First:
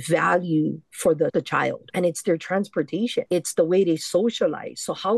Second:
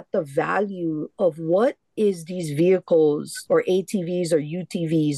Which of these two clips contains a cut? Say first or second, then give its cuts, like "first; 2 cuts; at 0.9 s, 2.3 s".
first; 2 cuts; at 1.3 s, 3.3 s